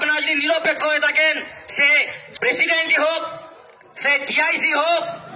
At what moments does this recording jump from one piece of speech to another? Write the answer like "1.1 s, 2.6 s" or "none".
2.2 s